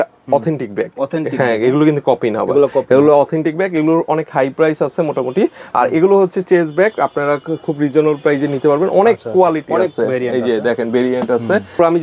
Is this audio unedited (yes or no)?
yes